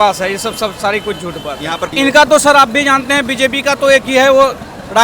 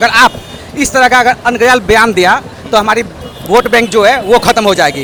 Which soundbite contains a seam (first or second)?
first